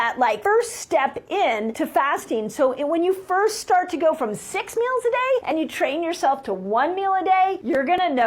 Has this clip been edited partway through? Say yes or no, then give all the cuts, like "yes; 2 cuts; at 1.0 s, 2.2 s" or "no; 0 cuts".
no; 0 cuts